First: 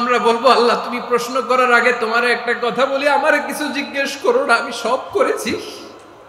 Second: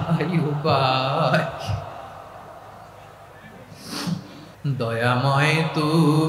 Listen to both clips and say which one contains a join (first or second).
second